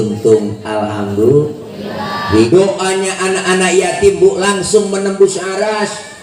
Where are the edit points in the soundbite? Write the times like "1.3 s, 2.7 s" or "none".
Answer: 2.3 s